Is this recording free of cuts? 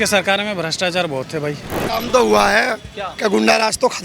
no; 1 cut; at 1.8 s

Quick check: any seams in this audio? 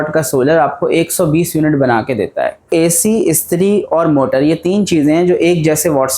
yes; 1 cut; at 2.7 s

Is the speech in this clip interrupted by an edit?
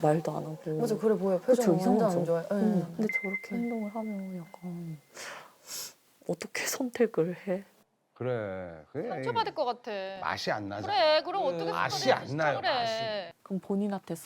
yes; 2 cuts; at 2.9 s, 13.3 s

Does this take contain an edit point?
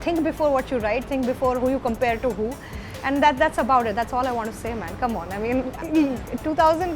yes; 1 cut; at 5.8 s

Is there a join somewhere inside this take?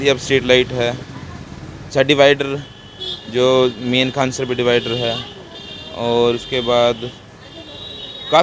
no; 0 cuts

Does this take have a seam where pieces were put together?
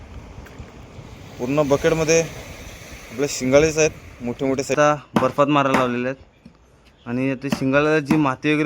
yes; 1 cut; at 4.8 s

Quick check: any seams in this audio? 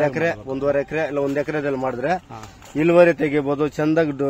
no; 0 cuts

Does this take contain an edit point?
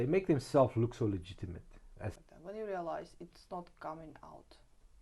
yes; 1 cut; at 2.2 s

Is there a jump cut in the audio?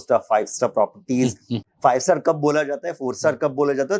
yes; 1 cut; at 1.7 s

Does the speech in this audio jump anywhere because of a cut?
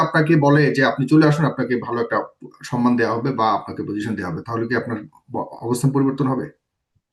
no; 0 cuts

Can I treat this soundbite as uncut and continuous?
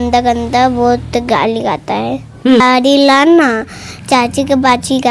no; 1 cut; at 2.6 s

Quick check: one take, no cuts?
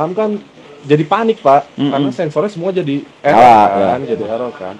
yes; 0 cuts

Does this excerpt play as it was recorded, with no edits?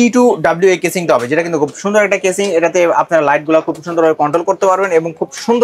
yes; 0 cuts

